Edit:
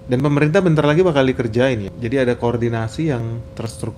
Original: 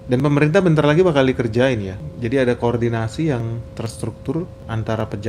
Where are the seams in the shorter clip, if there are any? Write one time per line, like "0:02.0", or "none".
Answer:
0:01.9